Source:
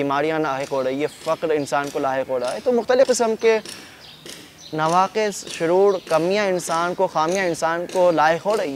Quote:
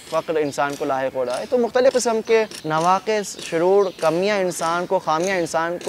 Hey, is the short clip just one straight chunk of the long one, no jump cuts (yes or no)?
no